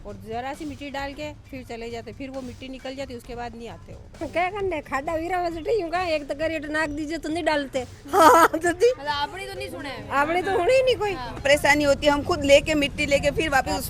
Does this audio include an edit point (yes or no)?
yes